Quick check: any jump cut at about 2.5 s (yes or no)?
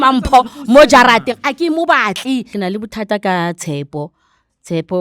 yes